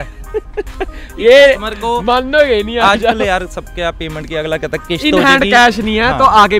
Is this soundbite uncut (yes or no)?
yes